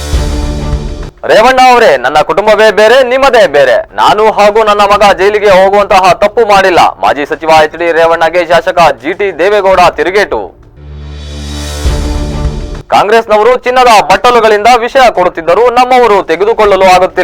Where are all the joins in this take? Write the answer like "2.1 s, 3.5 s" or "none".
1.1 s

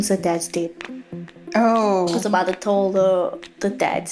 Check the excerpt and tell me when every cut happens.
none

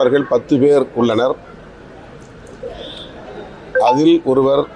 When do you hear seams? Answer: none

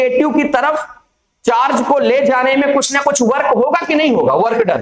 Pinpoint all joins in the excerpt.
none

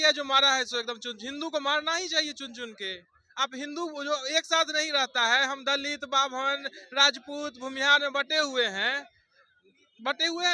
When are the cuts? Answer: none

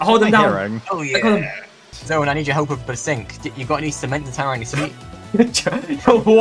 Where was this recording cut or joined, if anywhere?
1.9 s, 5.1 s

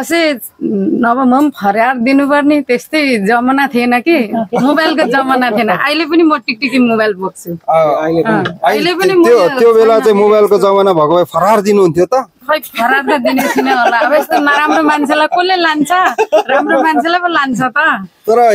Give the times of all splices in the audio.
none

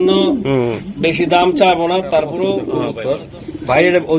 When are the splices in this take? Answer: 2.9 s

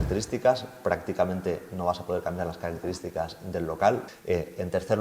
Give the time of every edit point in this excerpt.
4.1 s

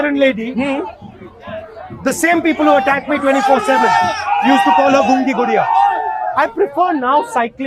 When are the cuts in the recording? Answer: 6.3 s

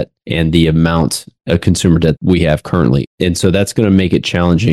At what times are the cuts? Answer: 3.0 s

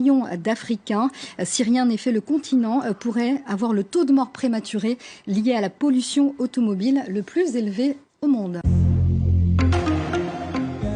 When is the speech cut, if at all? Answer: 8.6 s

